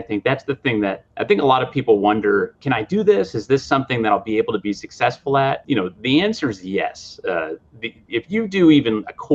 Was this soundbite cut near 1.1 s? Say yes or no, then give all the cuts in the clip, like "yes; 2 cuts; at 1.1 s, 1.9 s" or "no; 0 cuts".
yes; 3 cuts; at 1.1 s, 2.6 s, 5.6 s